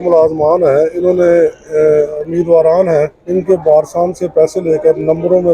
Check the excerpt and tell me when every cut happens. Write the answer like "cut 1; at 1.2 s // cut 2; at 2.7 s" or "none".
cut 1; at 2.3 s // cut 2; at 3.2 s